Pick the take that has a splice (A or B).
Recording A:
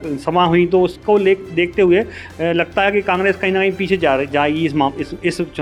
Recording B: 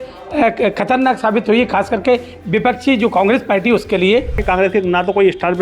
B